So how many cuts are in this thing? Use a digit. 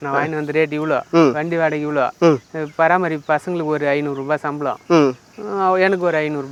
0